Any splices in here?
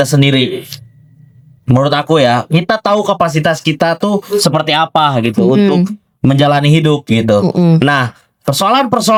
no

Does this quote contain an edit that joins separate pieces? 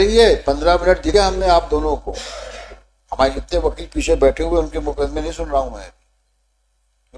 yes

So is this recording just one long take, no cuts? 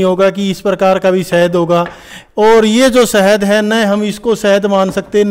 yes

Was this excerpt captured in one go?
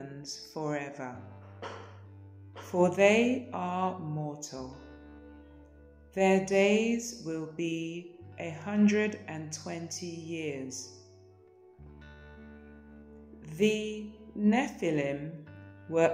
yes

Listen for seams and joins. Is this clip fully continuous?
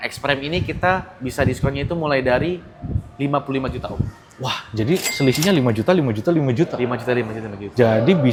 yes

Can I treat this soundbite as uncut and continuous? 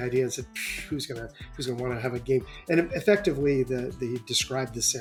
yes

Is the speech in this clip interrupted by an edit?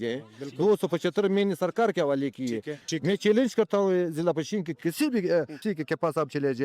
yes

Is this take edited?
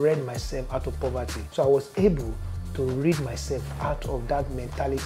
yes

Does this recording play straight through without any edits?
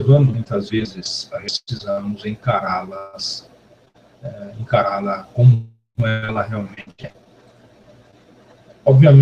no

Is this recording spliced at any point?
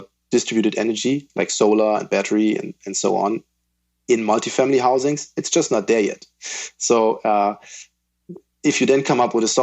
no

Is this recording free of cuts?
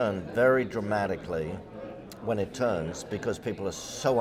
yes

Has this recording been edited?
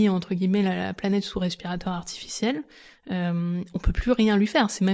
no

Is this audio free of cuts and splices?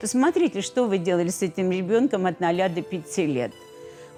yes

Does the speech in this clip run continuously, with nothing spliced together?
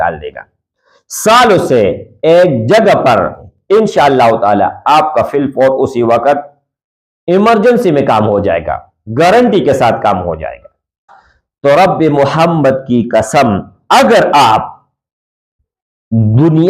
no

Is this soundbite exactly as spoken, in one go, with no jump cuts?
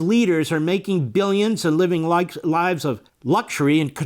no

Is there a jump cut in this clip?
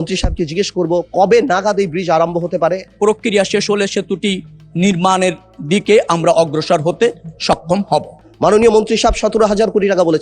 yes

